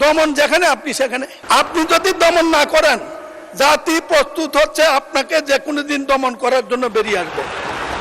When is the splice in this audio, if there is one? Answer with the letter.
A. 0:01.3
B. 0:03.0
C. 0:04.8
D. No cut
A